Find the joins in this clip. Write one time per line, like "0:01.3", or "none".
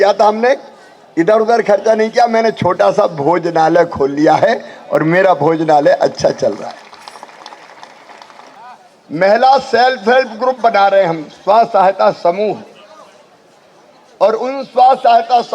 0:08.5